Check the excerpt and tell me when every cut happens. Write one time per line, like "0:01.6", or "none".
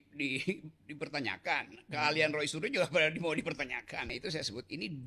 0:04.2